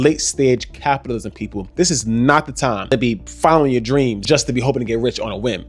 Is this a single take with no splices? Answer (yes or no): no